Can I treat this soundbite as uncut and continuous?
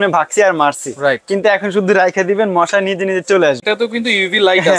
no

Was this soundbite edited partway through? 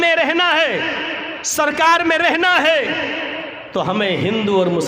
yes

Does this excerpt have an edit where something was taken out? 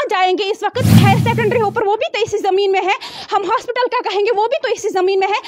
yes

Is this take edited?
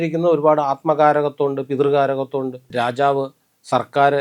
yes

